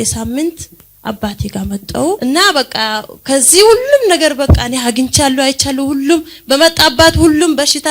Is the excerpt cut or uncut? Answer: cut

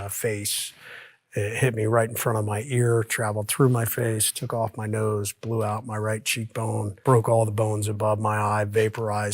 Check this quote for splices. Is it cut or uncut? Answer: cut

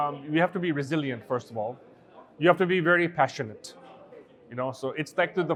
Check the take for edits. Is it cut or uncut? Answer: uncut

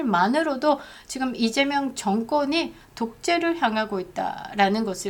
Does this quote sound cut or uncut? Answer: uncut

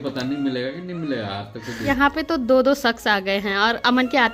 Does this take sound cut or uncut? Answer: cut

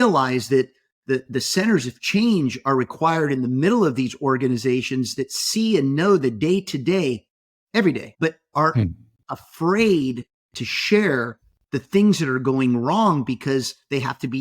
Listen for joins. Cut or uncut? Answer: cut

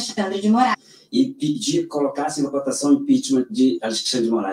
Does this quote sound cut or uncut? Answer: cut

